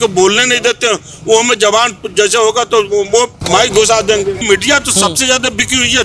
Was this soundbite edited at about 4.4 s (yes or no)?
yes